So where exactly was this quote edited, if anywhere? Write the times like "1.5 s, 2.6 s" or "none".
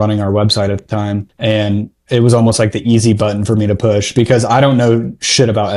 1.3 s